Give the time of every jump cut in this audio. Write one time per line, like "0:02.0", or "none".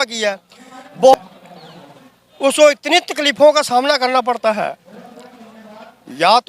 0:01.1